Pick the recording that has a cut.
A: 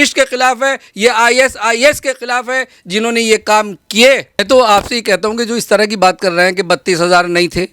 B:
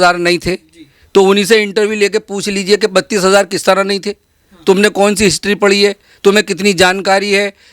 A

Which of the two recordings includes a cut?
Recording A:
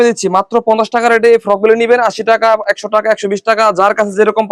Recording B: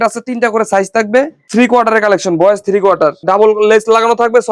B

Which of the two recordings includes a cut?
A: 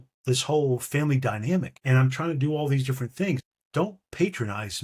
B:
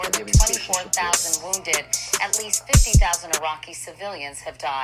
A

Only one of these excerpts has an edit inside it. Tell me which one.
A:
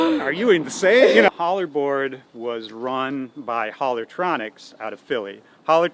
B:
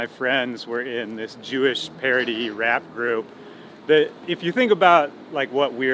A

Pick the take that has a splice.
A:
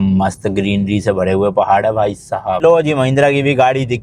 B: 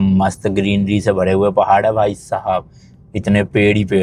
A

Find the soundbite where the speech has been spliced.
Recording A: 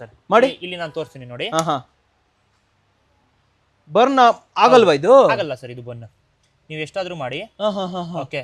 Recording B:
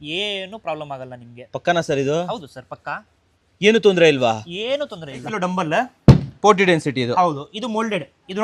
B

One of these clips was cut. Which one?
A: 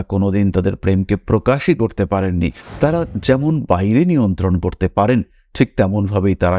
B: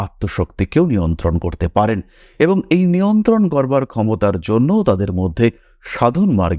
A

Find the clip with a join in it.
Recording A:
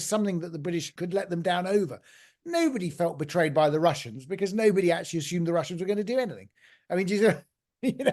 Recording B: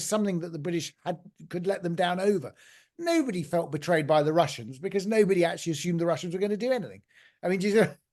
A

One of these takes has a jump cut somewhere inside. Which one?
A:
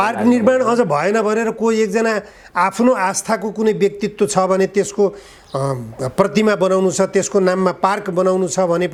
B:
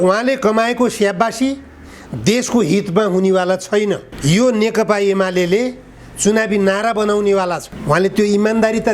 B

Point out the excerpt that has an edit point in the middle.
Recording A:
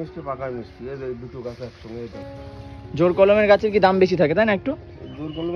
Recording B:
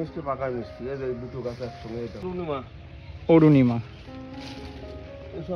B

